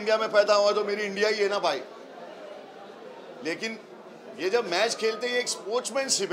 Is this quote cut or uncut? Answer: uncut